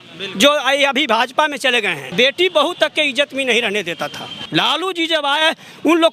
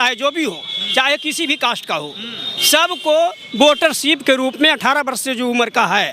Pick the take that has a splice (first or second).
first